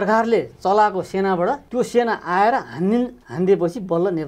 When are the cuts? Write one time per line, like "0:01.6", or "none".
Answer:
0:01.6
0:03.2